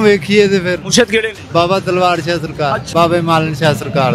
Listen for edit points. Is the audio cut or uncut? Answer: cut